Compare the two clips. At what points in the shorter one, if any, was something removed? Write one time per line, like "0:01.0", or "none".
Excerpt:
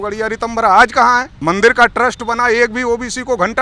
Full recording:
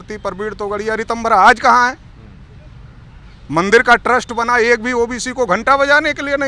0:01.3